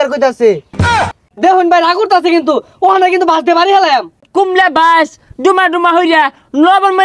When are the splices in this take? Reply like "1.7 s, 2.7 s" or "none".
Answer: 1.0 s, 4.3 s